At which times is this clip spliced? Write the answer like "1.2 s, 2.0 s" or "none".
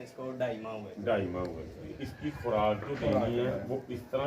2.0 s